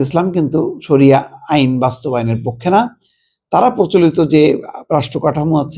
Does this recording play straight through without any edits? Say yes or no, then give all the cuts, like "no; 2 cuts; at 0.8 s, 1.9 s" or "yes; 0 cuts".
yes; 0 cuts